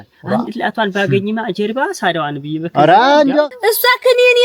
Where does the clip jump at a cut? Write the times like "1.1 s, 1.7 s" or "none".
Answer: 3.5 s